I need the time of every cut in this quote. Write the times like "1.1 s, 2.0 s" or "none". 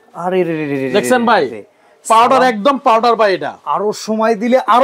none

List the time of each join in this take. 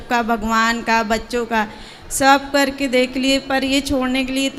none

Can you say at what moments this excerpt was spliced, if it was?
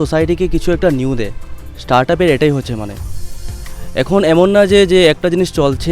none

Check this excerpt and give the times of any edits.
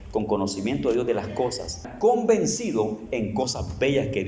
1.9 s

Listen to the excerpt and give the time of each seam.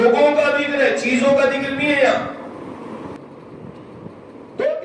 3.2 s

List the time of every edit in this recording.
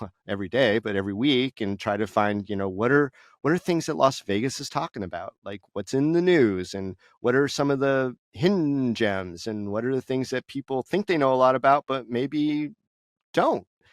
none

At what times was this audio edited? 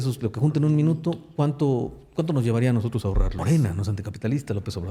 3.4 s

